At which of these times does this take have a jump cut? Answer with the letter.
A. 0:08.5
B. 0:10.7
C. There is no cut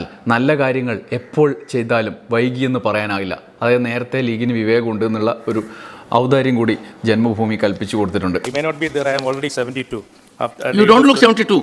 A